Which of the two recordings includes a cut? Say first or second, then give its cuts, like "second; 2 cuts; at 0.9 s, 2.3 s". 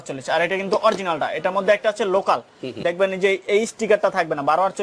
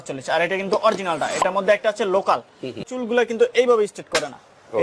second; 1 cut; at 2.8 s